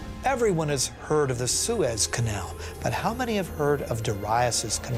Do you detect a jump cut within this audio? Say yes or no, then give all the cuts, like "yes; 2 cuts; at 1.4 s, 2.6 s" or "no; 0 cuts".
no; 0 cuts